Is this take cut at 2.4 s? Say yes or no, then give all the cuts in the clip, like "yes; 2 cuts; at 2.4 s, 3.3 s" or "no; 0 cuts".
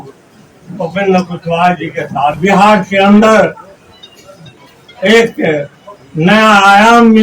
yes; 1 cut; at 2.4 s